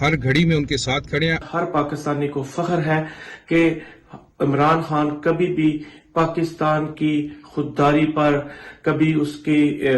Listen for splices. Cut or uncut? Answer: cut